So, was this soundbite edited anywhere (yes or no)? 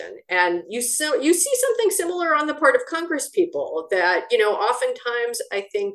no